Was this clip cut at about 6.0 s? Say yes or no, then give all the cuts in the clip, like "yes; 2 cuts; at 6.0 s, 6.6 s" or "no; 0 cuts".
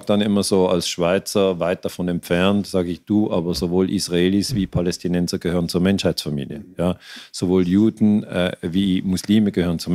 no; 0 cuts